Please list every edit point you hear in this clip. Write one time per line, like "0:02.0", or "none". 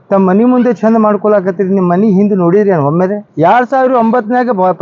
0:03.2